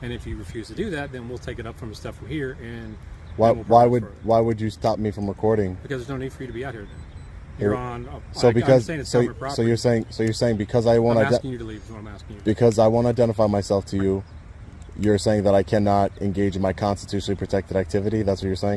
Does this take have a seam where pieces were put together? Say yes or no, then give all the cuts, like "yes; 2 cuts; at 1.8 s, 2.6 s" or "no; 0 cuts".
no; 0 cuts